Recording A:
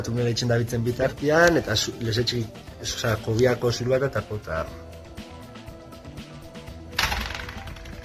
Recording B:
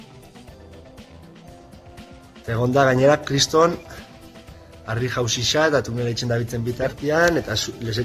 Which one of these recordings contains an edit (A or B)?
B